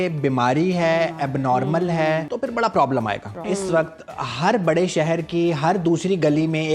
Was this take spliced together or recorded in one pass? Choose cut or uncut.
cut